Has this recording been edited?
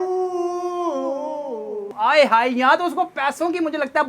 yes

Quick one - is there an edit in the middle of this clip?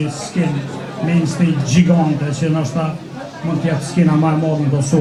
no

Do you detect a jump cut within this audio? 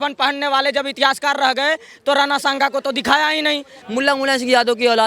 yes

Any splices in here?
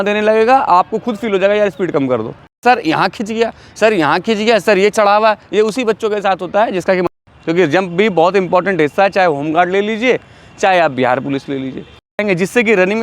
yes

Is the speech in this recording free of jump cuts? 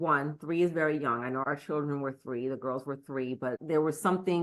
no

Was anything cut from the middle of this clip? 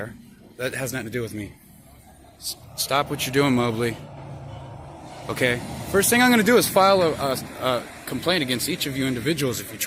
no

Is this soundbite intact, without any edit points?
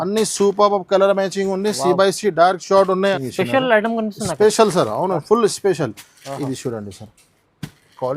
no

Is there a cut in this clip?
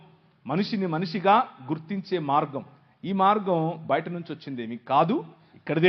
no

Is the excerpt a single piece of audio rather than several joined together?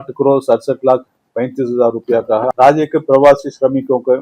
no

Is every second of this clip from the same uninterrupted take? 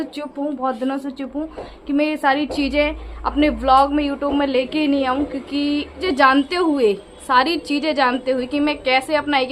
no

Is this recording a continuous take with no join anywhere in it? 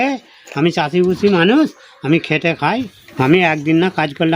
no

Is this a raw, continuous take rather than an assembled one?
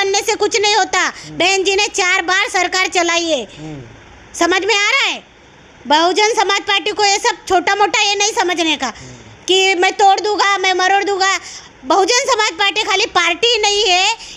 yes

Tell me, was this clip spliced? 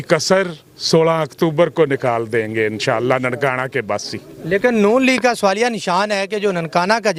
no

